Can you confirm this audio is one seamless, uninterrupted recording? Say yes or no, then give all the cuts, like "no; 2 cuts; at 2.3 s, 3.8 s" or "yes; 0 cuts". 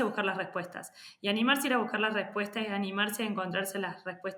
yes; 0 cuts